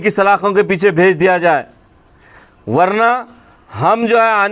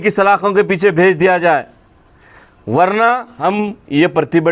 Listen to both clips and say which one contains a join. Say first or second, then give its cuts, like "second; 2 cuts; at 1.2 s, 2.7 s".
second; 1 cut; at 3.3 s